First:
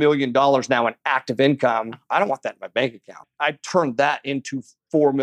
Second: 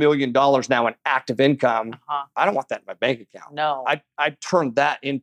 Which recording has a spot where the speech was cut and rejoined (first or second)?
first